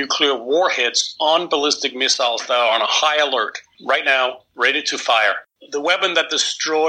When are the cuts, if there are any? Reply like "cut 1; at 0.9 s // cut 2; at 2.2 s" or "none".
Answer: cut 1; at 3.7 s // cut 2; at 5.4 s